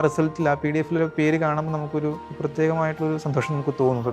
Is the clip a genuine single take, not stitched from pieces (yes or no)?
no